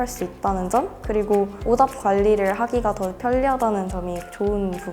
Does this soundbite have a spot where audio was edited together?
yes; 1 cut; at 1.6 s

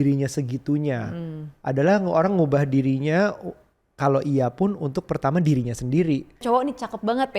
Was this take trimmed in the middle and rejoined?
yes; 1 cut; at 6.4 s

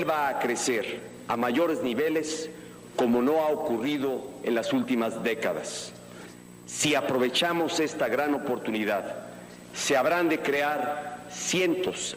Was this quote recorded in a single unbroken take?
no; 1 cut; at 4.4 s

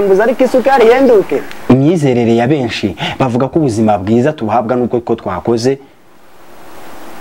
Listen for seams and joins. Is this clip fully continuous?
no; 1 cut; at 1.5 s

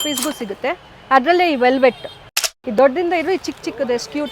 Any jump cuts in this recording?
yes; 1 cut; at 2.4 s

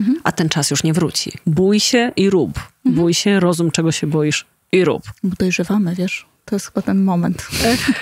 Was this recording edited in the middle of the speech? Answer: yes; 1 cut; at 1.3 s

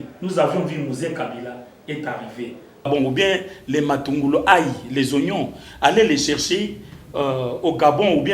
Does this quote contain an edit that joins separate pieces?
yes; 1 cut; at 2.7 s

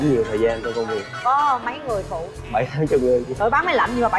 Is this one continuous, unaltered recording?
no; 3 cuts; at 1.1 s, 2.3 s, 3.3 s

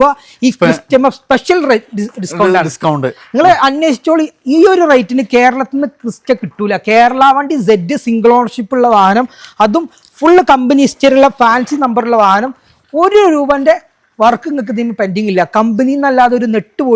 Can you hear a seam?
no; 0 cuts

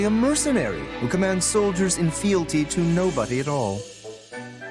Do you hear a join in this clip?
yes; 1 cut; at 3.8 s

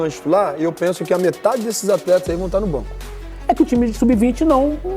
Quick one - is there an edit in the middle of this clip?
yes; 1 cut; at 3.3 s

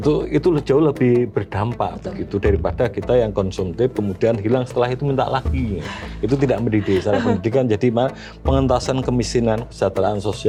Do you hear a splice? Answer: no; 0 cuts

